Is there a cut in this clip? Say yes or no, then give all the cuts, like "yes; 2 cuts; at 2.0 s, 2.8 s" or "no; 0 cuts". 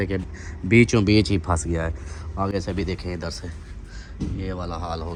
no; 0 cuts